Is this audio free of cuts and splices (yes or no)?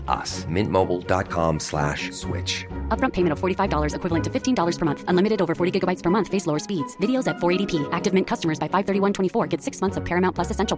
yes